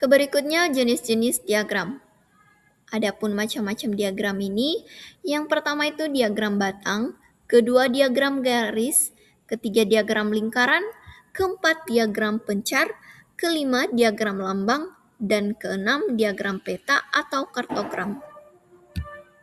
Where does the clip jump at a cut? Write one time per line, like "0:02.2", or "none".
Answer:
none